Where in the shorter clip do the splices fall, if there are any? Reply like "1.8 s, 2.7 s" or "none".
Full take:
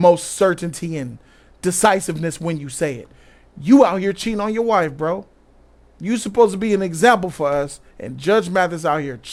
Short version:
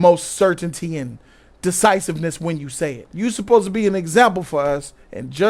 3.0 s

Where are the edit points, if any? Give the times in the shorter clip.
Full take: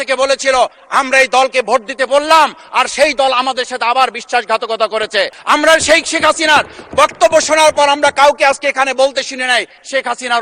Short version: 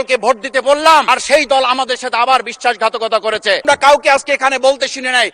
1.1 s, 3.6 s

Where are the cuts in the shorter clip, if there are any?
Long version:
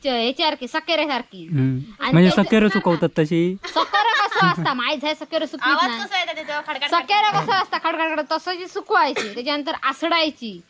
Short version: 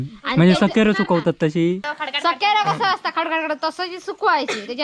1.9 s

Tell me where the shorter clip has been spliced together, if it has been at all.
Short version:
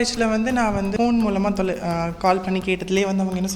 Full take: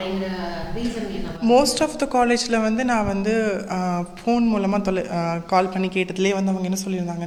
0.9 s

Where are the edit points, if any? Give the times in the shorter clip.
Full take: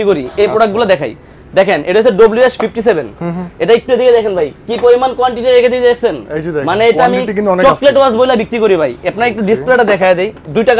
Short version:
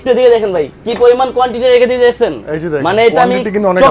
none

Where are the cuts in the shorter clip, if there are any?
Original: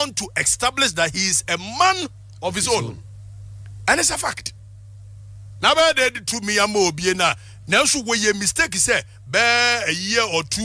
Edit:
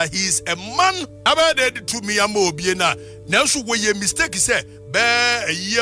1.1 s

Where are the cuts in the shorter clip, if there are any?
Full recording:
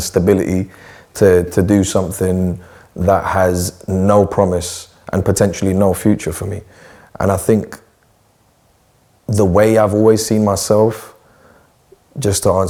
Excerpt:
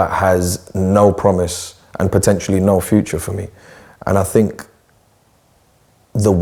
none

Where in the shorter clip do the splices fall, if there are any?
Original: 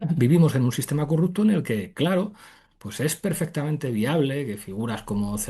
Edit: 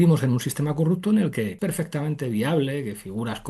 1.6 s

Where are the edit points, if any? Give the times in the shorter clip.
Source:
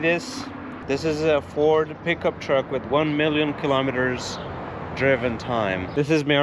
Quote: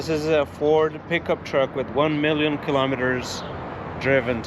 none

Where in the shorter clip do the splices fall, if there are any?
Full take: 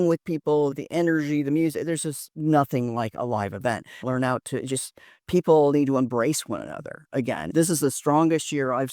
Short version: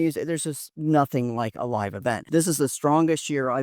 2.2 s

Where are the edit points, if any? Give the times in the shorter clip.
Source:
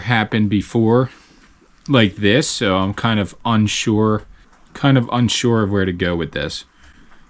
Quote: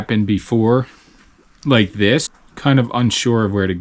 2.3 s

